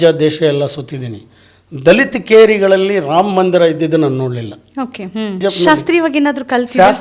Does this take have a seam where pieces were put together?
yes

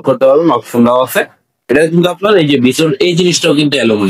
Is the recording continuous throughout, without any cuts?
yes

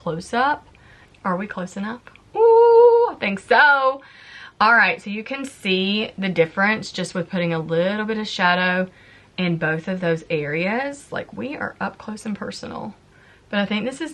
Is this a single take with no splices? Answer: yes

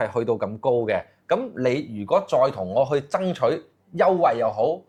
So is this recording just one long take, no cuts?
yes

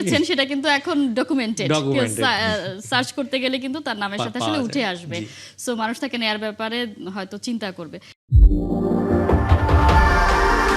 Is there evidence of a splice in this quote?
no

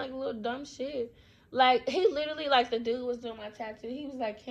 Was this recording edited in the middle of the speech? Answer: no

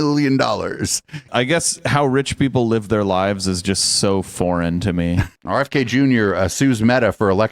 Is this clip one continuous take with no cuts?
no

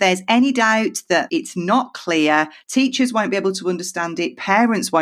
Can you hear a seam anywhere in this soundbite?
yes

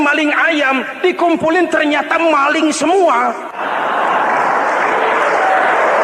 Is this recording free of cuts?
no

